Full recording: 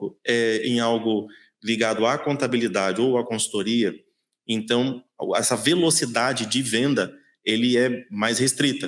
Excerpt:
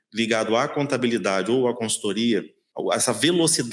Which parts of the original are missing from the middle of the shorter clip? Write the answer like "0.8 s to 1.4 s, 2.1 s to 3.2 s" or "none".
4.1 s to 5.1 s